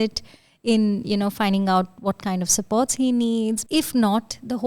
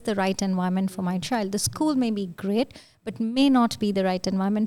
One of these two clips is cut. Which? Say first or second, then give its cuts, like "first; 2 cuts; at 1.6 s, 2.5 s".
first; 1 cut; at 3.6 s